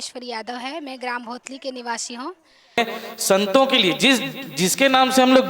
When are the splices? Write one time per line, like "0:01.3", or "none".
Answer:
0:02.8